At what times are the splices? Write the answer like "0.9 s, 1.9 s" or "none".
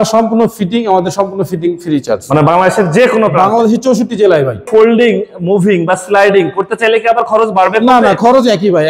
4.7 s